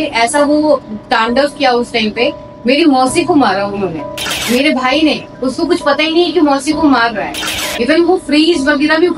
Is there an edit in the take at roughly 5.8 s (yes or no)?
no